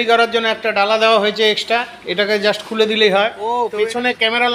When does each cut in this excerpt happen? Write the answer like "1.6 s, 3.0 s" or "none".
3.5 s